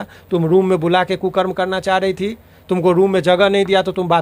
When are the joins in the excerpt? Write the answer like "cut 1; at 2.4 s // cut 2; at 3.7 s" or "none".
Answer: none